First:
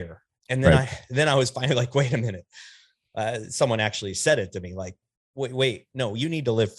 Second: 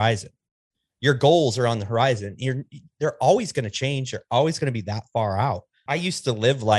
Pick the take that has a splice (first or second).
second